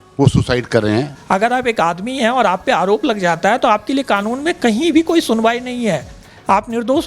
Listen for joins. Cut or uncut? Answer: cut